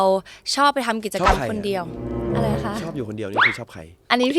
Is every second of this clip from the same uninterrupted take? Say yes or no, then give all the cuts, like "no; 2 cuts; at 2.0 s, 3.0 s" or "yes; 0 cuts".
yes; 0 cuts